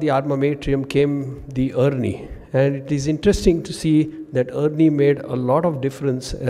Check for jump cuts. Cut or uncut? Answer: uncut